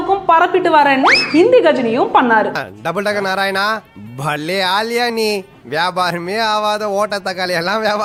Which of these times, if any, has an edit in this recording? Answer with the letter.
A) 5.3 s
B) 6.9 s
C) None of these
C